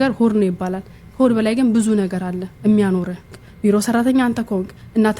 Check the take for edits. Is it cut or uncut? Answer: cut